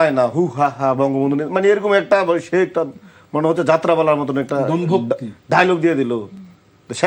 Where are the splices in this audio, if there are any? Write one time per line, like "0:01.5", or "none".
none

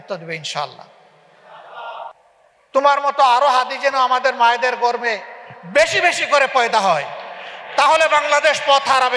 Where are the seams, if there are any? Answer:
0:02.1

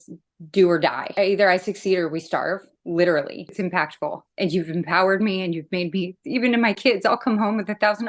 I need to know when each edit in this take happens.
0:01.1
0:03.6

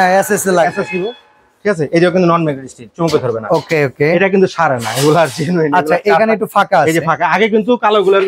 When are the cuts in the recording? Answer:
none

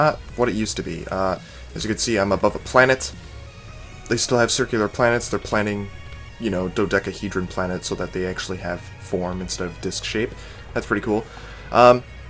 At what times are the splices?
0:01.0

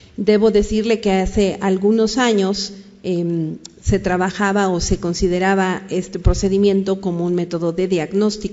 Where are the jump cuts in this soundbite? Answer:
none

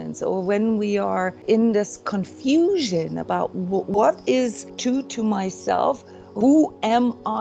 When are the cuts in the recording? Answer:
0:01.4
0:03.9
0:04.7
0:06.3

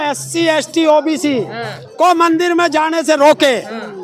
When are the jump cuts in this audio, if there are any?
none

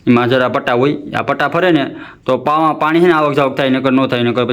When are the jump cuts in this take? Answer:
none

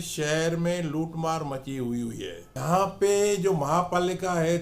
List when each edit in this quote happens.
0:02.5

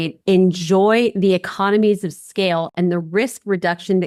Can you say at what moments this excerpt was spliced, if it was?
none

